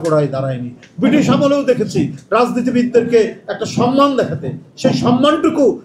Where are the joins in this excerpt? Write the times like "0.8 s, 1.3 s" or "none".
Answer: none